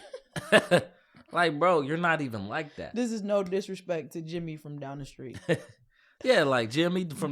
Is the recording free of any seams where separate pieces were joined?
yes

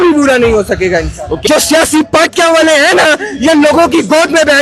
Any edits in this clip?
yes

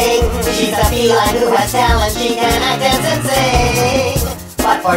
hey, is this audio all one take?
yes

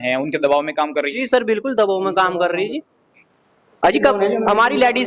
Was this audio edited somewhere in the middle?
no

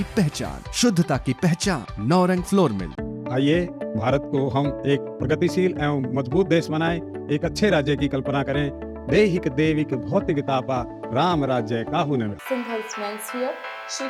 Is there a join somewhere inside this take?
no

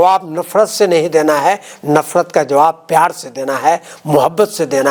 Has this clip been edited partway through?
no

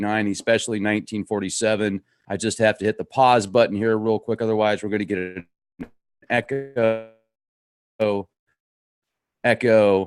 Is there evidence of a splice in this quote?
no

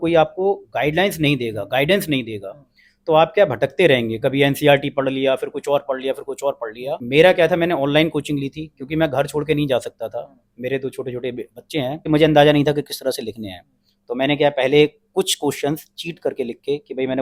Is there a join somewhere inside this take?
yes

